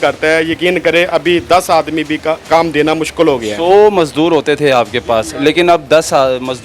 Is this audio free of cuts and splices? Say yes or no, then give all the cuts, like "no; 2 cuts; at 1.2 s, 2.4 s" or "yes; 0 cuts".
no; 1 cut; at 2.4 s